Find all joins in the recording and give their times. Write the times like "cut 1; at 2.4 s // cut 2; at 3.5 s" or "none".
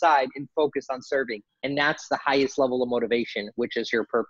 none